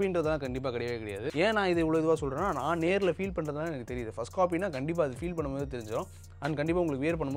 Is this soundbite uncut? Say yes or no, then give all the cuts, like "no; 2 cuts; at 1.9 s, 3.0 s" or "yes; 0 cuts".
yes; 0 cuts